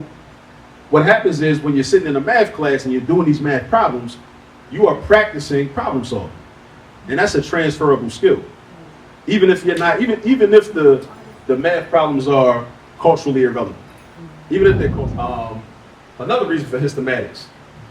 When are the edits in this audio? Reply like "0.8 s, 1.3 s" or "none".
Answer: 14.9 s